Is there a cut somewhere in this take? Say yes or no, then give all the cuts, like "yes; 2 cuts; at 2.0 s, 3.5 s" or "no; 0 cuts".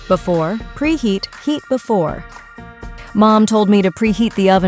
no; 0 cuts